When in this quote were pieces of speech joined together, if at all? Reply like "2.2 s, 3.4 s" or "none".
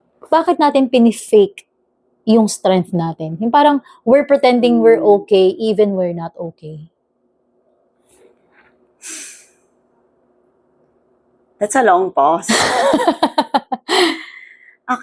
none